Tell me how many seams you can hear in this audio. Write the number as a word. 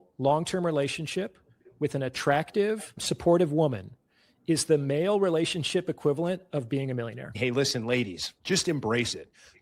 three